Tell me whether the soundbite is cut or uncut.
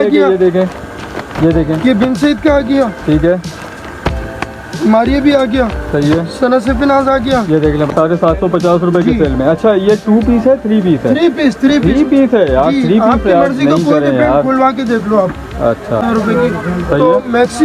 cut